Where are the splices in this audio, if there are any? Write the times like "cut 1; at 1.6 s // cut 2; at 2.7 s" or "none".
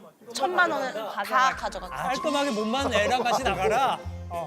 cut 1; at 1.9 s